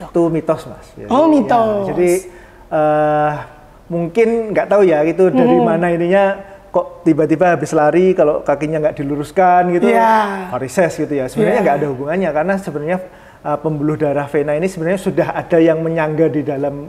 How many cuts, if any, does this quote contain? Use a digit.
0